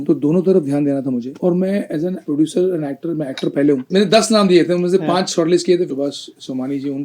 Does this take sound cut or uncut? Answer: cut